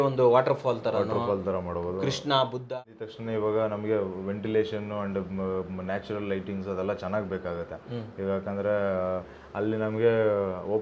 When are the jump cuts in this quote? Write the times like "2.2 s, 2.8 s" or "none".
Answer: 2.7 s